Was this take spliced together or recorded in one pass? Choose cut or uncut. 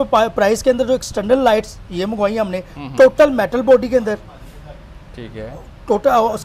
uncut